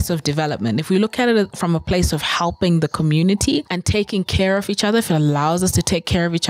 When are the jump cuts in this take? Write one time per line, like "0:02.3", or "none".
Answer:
0:03.8